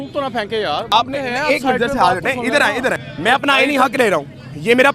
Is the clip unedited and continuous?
no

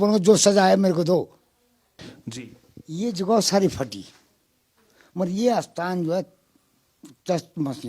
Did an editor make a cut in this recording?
yes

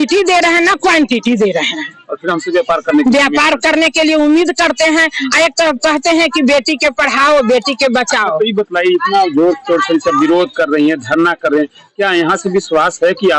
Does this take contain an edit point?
no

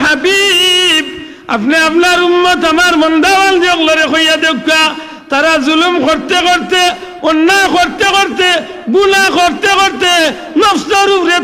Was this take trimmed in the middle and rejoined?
no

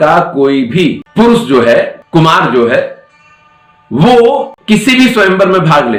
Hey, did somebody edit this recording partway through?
no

